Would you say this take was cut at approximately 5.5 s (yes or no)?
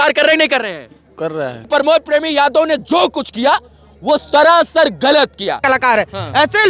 yes